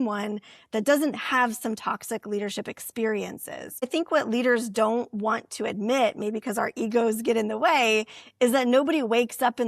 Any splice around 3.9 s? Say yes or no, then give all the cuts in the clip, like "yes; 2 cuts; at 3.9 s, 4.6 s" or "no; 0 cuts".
yes; 1 cut; at 3.9 s